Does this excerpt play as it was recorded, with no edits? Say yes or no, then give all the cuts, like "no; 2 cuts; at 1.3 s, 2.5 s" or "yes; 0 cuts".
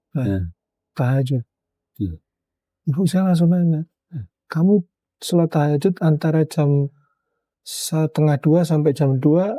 yes; 0 cuts